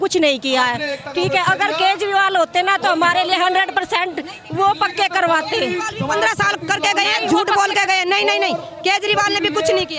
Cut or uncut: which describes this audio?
uncut